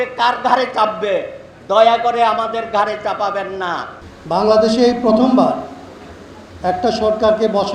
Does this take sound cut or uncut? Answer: cut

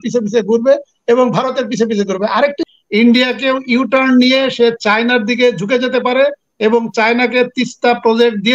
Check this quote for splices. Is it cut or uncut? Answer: cut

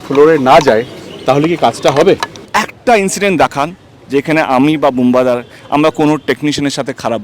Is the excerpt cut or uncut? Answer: cut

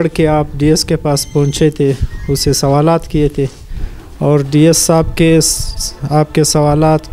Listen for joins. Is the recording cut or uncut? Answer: uncut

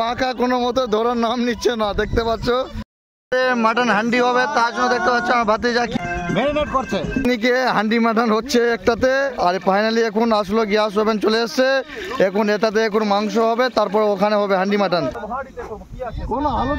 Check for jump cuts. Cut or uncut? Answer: cut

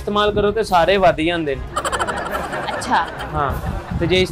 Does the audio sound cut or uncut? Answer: uncut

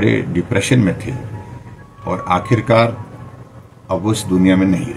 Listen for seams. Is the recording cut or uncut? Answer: uncut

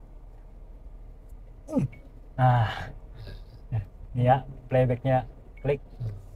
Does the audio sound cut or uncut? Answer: uncut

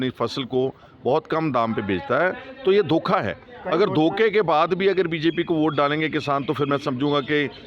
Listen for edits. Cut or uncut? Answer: uncut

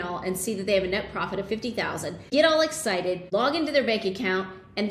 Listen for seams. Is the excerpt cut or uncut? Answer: cut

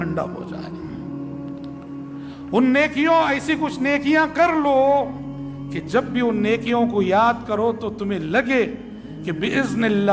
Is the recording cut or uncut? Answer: uncut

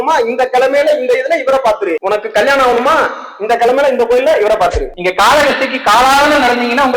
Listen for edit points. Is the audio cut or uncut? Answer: cut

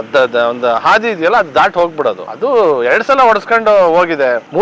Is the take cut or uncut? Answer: cut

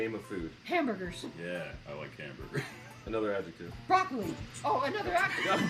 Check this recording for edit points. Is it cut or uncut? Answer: cut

